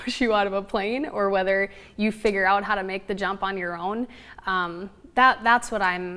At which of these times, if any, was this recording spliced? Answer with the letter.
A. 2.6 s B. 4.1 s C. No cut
C